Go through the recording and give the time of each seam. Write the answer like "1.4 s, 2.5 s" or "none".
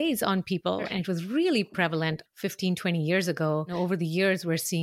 0.9 s, 2.3 s, 3.7 s